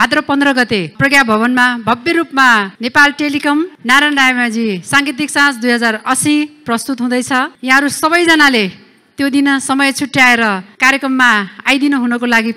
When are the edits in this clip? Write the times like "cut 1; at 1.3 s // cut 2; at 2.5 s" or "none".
cut 1; at 7.5 s // cut 2; at 10.7 s